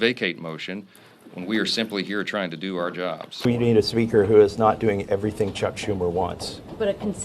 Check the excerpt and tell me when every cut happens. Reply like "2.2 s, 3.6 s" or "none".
3.5 s